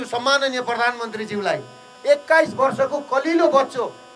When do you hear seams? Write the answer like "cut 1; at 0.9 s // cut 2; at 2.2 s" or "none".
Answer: cut 1; at 1.9 s